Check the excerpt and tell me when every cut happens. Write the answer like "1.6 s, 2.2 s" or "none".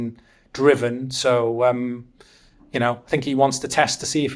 none